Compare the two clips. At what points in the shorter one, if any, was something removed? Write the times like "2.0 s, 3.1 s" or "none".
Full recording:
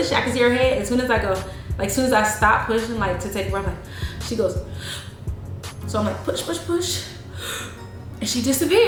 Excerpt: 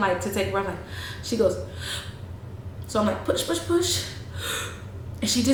none